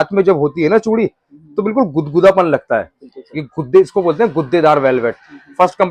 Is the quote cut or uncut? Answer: uncut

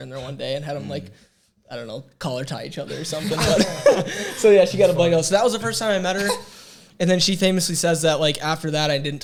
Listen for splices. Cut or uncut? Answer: uncut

